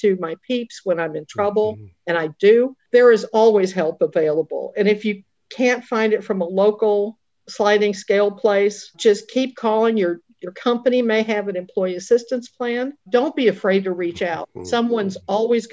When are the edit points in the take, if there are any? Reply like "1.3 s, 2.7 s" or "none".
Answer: 13.0 s